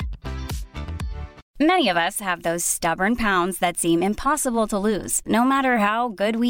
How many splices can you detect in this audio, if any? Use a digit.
1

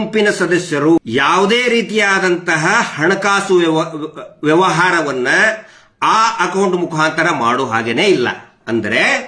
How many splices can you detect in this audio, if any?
1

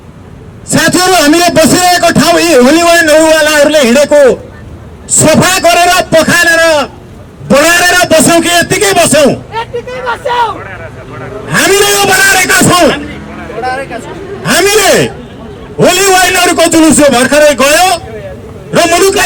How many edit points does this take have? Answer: 0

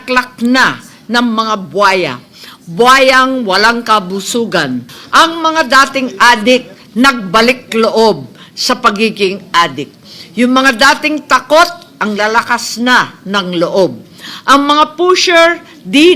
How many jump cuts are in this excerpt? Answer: 1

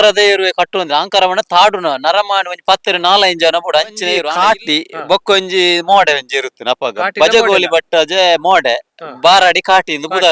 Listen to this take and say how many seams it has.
1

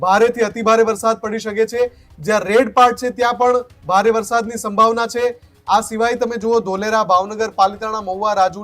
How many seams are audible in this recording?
0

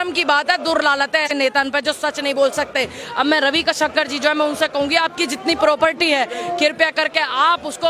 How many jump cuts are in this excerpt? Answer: 1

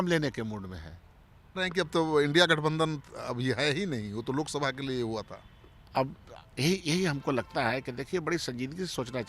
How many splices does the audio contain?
1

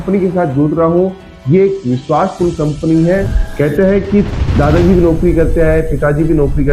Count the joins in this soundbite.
1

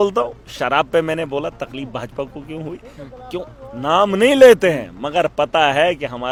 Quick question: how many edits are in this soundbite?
0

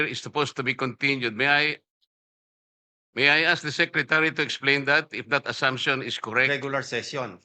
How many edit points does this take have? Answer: 1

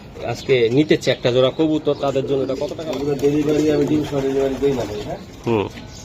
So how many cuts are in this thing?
1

